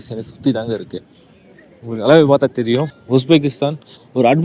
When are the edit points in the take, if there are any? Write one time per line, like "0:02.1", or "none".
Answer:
0:03.0